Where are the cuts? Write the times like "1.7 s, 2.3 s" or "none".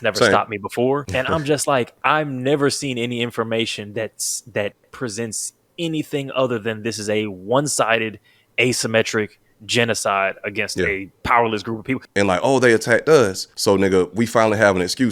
1.1 s, 5.7 s, 11.1 s, 12.0 s, 13.5 s